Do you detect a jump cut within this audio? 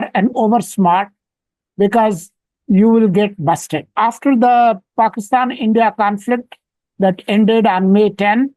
yes; 1 cut; at 3.9 s

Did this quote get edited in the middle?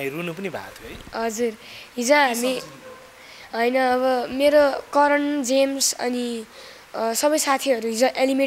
no; 0 cuts

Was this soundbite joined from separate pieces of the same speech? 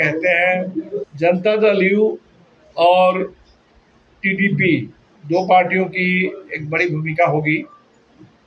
yes; 1 cut; at 1.0 s

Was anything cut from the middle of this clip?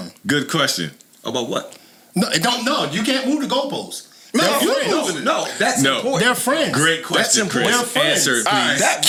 no; 0 cuts

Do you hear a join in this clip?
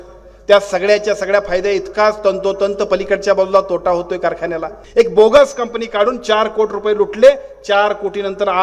yes; 1 cut; at 4.8 s

